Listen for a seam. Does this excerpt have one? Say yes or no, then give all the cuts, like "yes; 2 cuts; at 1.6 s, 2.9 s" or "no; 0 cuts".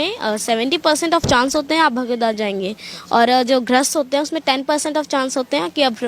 no; 0 cuts